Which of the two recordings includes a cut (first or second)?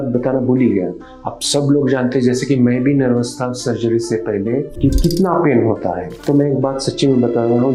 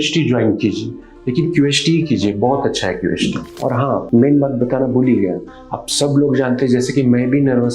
second